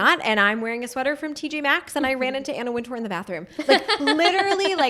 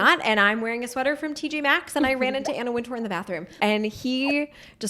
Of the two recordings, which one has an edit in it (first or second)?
second